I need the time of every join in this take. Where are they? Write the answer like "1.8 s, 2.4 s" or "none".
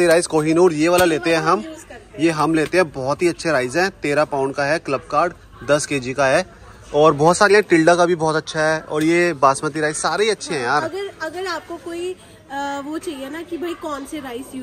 none